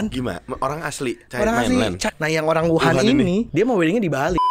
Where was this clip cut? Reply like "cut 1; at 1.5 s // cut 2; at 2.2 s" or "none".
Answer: cut 1; at 2.1 s // cut 2; at 3.5 s

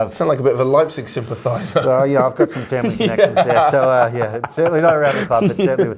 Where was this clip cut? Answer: none

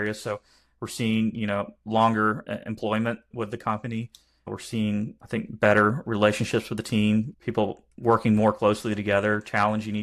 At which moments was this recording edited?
cut 1; at 3.3 s // cut 2; at 4.4 s // cut 3; at 5.2 s // cut 4; at 7.3 s

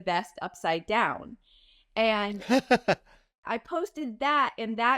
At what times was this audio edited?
cut 1; at 3.2 s

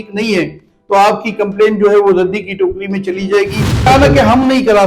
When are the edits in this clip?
cut 1; at 3.8 s

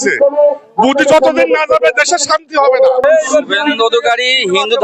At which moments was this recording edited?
cut 1; at 3.0 s

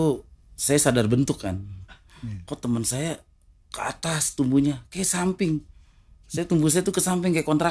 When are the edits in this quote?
none

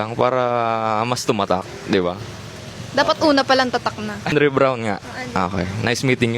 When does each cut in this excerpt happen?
cut 1; at 4.3 s

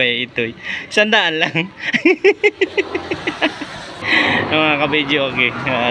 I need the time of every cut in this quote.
cut 1; at 4.0 s

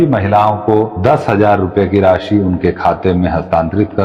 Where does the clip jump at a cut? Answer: cut 1; at 0.9 s

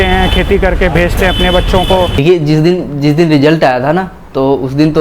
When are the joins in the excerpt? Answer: cut 1; at 2.2 s

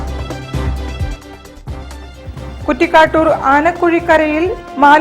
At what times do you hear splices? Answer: cut 1; at 1.3 s

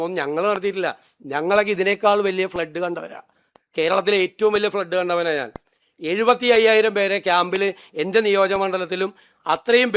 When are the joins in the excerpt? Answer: none

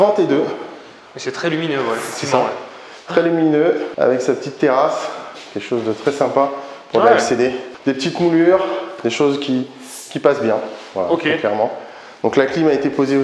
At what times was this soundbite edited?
none

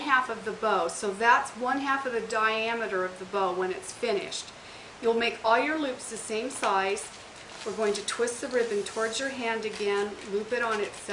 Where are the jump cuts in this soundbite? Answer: none

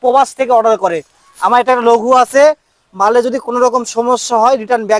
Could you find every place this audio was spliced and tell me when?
none

